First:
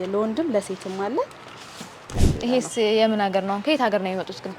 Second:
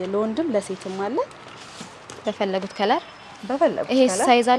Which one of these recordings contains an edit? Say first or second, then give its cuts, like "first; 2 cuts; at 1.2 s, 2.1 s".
first; 1 cut; at 2.0 s